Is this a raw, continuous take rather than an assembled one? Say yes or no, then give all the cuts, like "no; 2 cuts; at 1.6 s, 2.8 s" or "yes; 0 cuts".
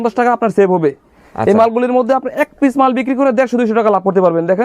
yes; 0 cuts